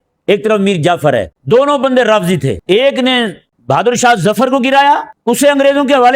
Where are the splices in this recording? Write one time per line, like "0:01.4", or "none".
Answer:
0:01.3
0:02.6
0:03.5
0:05.1